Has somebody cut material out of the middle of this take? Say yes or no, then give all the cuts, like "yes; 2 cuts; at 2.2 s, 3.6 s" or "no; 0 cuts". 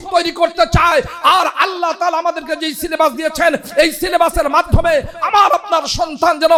no; 0 cuts